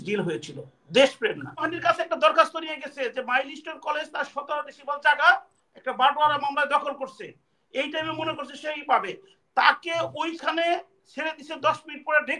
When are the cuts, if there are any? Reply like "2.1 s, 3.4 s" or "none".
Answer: 1.7 s